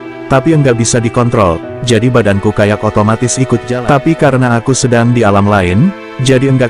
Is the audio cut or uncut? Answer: cut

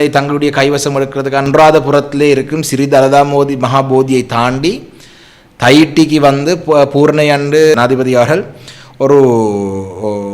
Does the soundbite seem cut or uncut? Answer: cut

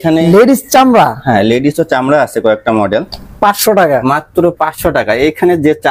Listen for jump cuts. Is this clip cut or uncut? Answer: cut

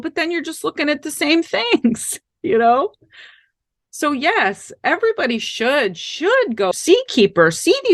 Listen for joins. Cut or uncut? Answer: cut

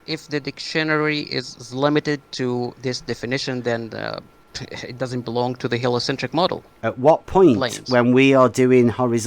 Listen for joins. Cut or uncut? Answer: cut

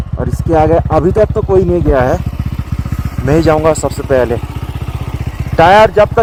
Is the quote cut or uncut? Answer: uncut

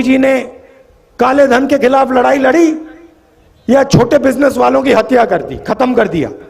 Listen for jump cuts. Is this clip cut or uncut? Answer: uncut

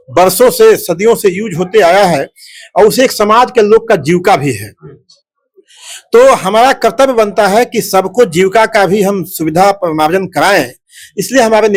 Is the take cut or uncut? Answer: uncut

